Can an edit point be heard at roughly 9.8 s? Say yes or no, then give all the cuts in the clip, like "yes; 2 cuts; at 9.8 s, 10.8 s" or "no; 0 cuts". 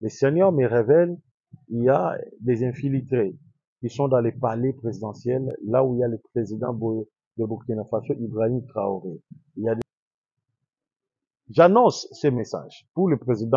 yes; 1 cut; at 9.8 s